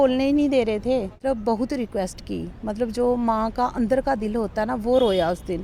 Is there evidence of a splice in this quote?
yes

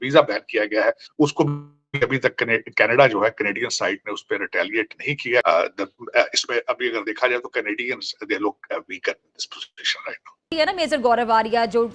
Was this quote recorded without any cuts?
no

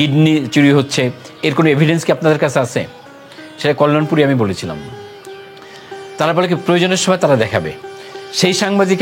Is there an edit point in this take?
no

